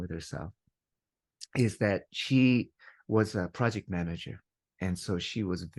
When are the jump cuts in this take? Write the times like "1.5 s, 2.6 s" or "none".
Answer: none